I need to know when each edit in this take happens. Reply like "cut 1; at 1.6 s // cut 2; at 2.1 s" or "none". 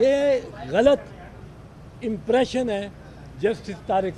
none